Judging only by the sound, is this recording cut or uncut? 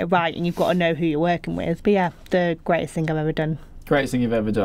cut